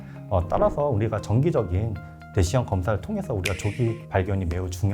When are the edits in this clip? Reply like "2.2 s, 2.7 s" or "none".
4.0 s